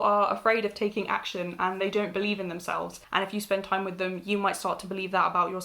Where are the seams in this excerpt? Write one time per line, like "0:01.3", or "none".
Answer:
0:03.0